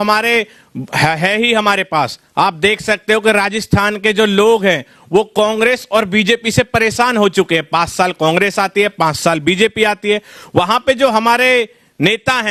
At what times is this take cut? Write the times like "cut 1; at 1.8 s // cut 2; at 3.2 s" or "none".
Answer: none